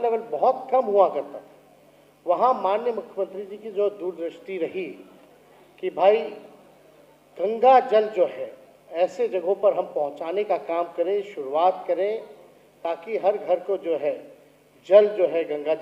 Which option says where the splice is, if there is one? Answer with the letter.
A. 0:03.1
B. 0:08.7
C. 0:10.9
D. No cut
D